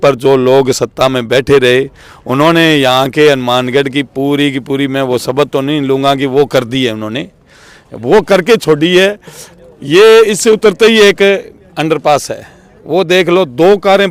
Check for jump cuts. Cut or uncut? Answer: uncut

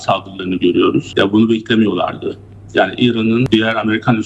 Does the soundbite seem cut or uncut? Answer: cut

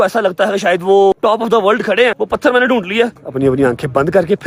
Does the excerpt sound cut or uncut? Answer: cut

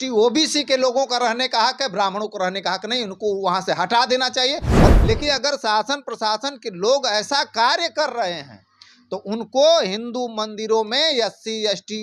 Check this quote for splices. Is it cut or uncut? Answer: cut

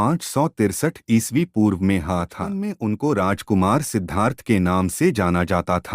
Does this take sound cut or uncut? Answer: cut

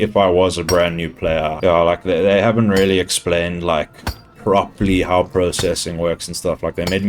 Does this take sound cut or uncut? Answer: cut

